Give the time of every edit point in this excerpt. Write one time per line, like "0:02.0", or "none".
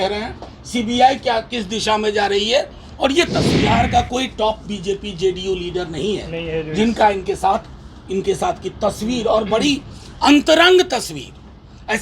0:03.5